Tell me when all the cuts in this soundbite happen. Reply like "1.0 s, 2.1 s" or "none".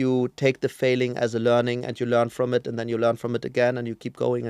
none